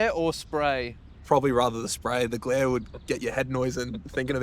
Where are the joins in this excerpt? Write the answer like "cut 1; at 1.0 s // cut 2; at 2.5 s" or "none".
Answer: cut 1; at 1.2 s

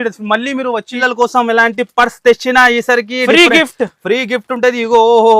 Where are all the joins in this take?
cut 1; at 0.9 s

